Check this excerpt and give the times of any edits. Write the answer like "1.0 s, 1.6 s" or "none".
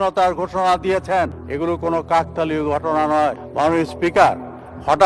1.4 s, 3.4 s